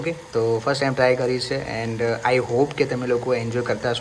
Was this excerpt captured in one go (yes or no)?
yes